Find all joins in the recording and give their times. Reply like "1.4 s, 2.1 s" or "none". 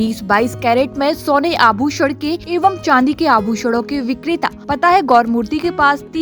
2.4 s, 4.6 s